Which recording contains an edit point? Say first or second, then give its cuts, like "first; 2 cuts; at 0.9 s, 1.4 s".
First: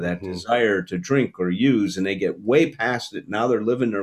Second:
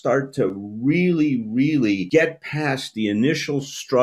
second; 1 cut; at 2.0 s